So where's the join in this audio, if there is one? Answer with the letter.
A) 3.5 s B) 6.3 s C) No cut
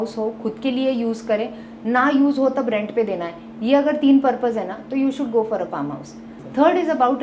B